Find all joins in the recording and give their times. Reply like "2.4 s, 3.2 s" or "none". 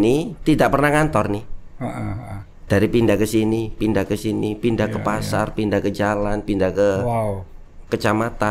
none